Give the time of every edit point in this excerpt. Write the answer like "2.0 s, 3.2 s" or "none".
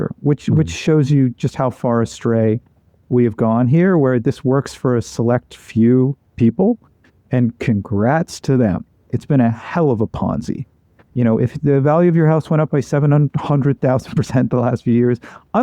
9.0 s

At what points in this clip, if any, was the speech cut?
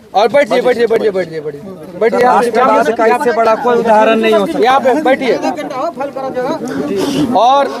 none

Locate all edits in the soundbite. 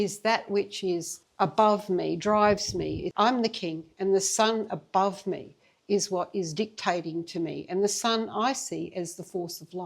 1.2 s, 3.1 s

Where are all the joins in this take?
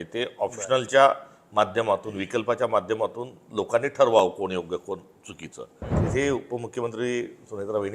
5.9 s

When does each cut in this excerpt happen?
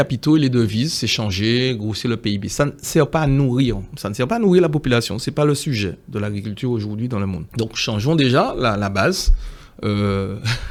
none

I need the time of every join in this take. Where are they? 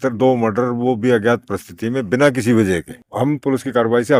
3.0 s

